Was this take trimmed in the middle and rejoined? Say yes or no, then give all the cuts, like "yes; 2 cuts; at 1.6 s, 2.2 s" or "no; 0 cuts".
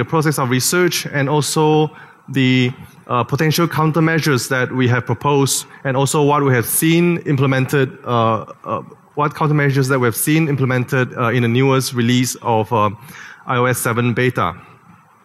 yes; 1 cut; at 3.5 s